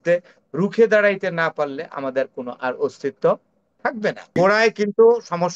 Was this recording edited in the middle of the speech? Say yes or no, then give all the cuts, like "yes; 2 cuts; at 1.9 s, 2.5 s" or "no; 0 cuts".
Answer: yes; 1 cut; at 4.4 s